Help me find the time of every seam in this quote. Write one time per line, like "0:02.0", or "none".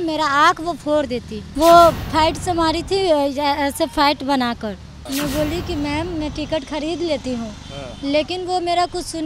0:01.4
0:04.9